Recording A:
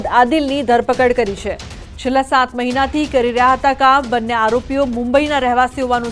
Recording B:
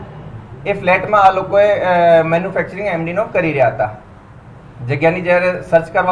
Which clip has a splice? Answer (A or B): A